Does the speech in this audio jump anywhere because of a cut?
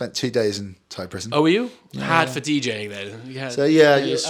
no; 0 cuts

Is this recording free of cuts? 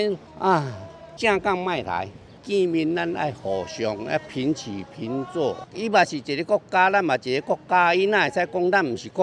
yes; 0 cuts

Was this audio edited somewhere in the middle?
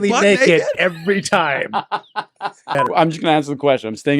yes; 1 cut; at 2.8 s

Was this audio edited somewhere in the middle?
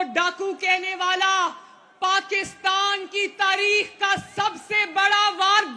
no; 0 cuts

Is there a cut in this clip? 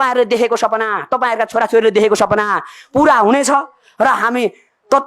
no; 0 cuts

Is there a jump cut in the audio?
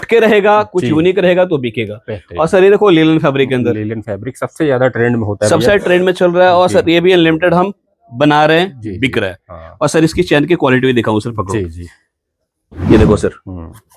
no; 0 cuts

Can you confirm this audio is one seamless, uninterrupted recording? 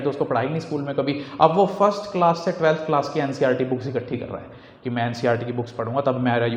yes; 0 cuts

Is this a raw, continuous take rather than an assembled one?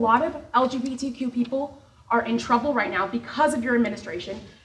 yes; 0 cuts

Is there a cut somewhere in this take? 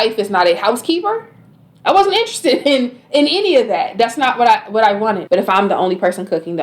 yes; 1 cut; at 5.2 s

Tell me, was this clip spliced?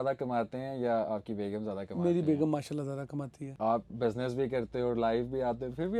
no; 0 cuts

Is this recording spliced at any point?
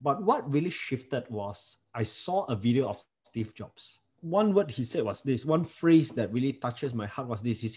yes; 1 cut; at 4.2 s

